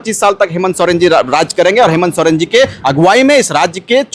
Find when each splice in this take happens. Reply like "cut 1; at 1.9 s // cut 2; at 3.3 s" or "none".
none